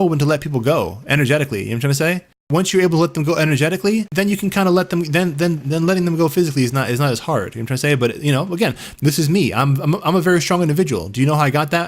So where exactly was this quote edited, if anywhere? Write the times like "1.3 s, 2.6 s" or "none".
2.5 s, 4.1 s